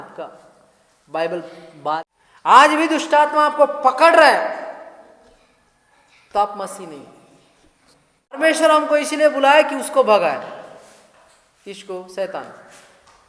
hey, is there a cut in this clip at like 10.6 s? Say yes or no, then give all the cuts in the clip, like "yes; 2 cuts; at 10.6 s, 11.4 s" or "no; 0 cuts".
no; 2 cuts; at 2.0 s, 8.4 s